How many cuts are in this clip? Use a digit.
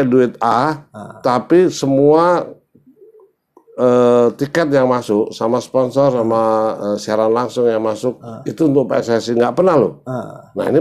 0